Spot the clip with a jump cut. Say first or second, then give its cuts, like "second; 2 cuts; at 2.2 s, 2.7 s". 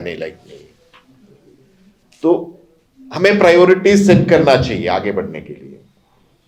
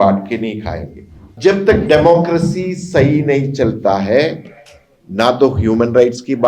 second; 1 cut; at 1.3 s